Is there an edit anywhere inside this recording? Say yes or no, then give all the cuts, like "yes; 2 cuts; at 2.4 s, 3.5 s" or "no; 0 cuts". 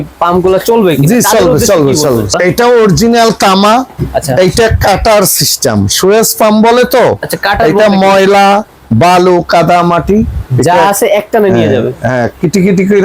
yes; 1 cut; at 2.3 s